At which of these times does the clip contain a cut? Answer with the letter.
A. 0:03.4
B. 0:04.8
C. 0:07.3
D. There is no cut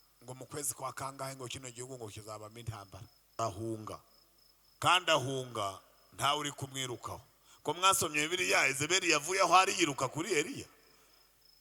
A